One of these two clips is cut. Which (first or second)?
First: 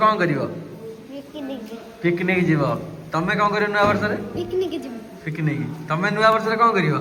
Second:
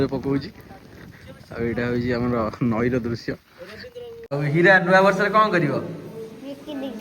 second